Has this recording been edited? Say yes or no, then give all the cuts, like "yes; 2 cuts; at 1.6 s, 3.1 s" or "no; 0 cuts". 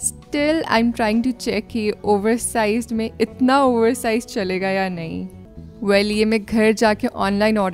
no; 0 cuts